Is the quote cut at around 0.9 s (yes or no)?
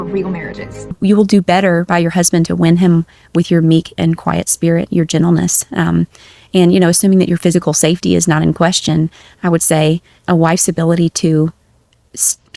yes